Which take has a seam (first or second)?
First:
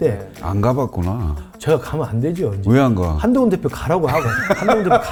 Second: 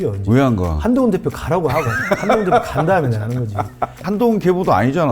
second